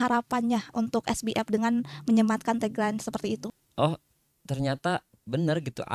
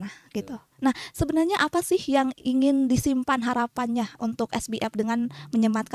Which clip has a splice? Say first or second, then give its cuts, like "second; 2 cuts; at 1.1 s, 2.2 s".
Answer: first; 1 cut; at 3.5 s